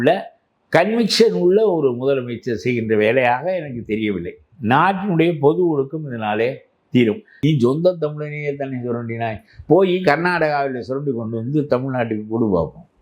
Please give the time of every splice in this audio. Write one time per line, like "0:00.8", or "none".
0:07.3